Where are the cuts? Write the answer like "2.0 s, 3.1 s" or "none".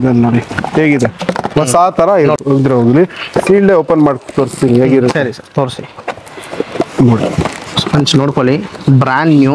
2.4 s